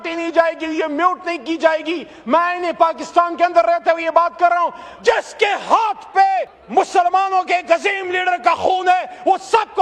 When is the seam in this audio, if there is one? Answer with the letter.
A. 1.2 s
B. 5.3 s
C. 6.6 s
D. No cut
C